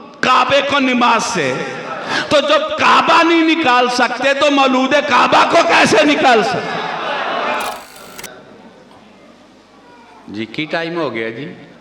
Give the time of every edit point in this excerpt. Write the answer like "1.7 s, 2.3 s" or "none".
7.8 s